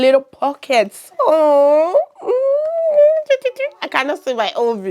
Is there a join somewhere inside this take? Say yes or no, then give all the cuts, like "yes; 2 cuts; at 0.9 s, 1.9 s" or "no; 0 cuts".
no; 0 cuts